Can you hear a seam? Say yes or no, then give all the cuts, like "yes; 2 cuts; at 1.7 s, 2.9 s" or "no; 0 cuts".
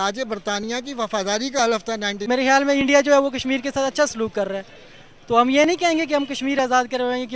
yes; 1 cut; at 2.2 s